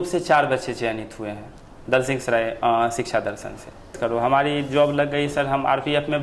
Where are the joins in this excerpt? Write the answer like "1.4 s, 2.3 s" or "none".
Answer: 4.0 s